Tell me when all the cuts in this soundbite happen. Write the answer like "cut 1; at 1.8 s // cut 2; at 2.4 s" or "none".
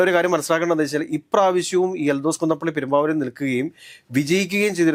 none